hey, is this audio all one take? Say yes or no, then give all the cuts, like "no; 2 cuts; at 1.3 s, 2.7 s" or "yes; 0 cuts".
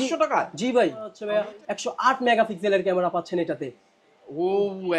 no; 1 cut; at 1.2 s